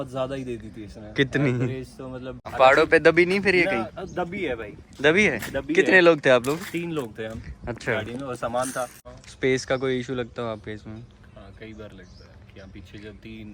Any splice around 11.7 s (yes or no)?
no